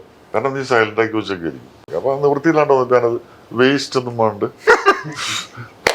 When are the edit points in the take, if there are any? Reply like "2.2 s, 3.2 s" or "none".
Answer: 1.9 s